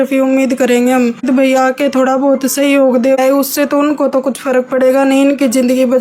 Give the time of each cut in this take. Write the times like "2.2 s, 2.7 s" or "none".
1.2 s, 3.2 s

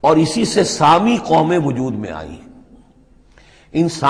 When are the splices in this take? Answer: none

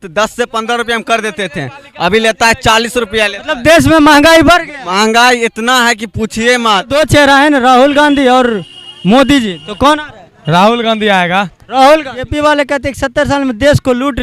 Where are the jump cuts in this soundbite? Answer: 6.9 s, 12.3 s

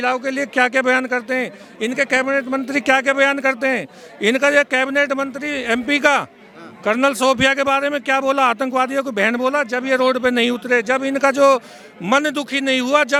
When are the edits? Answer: none

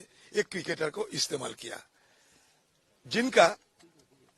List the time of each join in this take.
none

